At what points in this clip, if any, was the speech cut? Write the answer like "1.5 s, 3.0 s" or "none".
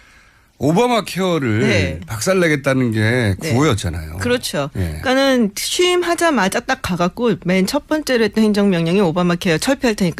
8.0 s